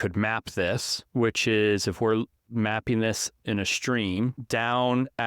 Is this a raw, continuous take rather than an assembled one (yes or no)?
no